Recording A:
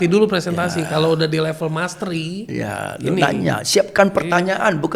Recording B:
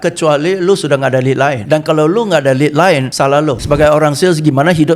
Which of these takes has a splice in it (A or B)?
B